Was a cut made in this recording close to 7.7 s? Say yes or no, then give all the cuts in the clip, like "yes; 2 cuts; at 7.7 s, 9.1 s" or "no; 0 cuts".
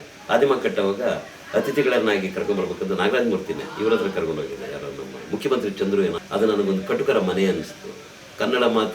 no; 1 cut; at 6.2 s